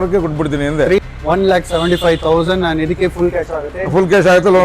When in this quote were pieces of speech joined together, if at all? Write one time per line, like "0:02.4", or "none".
0:01.0